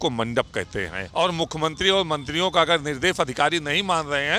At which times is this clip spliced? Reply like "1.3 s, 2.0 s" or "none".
1.0 s